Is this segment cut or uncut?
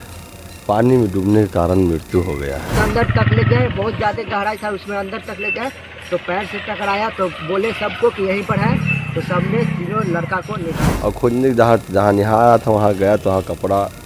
cut